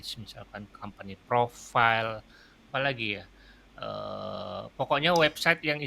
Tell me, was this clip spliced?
no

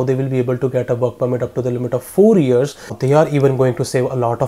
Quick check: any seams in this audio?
yes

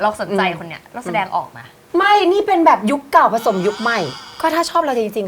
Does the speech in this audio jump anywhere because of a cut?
yes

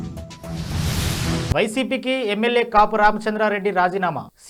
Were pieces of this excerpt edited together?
no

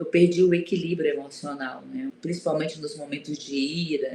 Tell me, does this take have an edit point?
yes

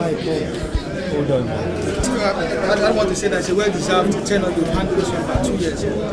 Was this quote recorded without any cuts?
no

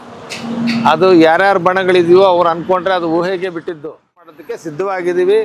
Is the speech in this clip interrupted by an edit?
yes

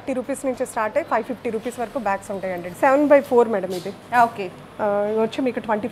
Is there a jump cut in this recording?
yes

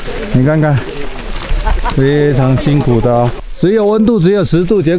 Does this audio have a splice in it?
yes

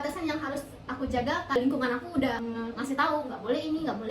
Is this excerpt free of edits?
no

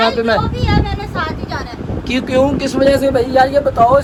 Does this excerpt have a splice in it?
no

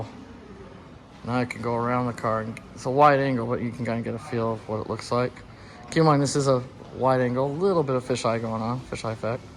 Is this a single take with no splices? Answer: yes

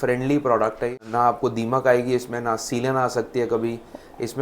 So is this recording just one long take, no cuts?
no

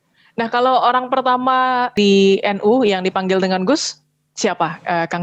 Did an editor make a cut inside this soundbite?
yes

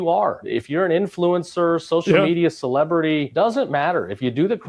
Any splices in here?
no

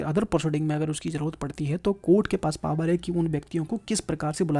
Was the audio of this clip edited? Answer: no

